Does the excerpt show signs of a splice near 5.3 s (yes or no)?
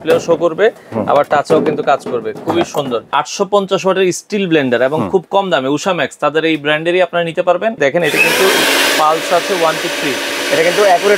no